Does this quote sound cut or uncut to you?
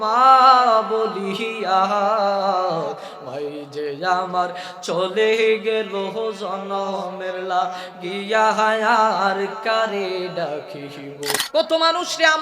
cut